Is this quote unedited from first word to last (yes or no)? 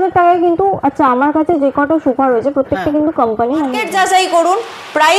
no